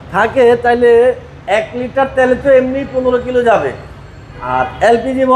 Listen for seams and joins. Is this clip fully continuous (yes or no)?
yes